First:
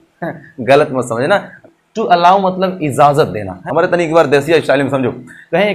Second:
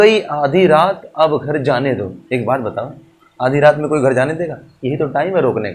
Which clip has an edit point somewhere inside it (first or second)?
first